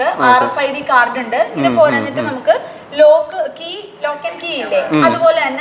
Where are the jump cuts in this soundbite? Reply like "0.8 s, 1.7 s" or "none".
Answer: none